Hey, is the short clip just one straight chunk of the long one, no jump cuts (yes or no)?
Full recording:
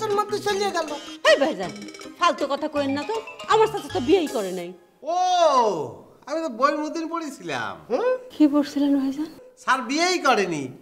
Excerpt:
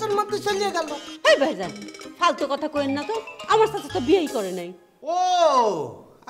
yes